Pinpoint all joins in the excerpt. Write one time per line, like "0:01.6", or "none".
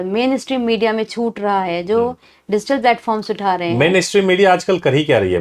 none